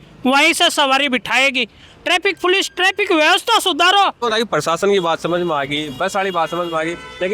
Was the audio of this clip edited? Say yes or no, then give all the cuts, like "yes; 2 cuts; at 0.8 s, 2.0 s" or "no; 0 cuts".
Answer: yes; 1 cut; at 4.2 s